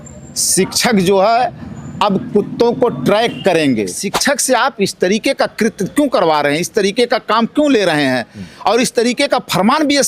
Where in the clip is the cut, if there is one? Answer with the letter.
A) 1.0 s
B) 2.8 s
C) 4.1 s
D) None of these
C